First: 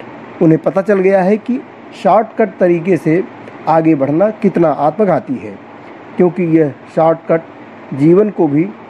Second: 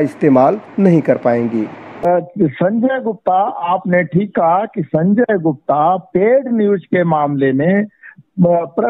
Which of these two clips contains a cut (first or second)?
second